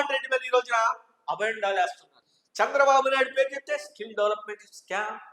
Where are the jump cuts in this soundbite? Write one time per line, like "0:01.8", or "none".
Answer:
0:02.0

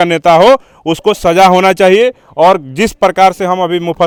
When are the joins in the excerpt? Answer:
none

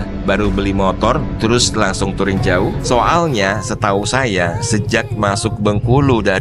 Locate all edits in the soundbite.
0:02.8

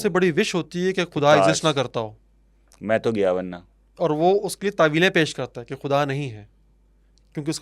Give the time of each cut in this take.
none

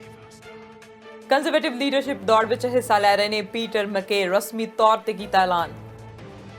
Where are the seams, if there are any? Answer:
0:01.1

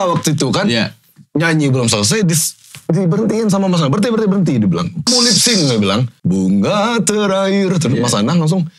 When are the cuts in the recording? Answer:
0:05.0
0:06.1

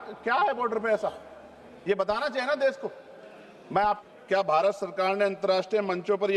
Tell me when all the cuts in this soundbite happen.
0:04.0

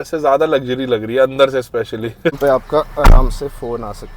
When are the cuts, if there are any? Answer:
0:02.4

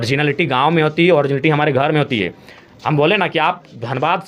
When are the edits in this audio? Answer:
none

